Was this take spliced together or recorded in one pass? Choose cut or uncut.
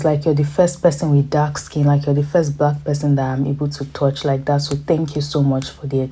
uncut